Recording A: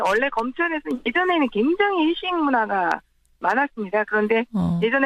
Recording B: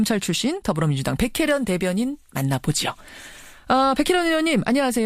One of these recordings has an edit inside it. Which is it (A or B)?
B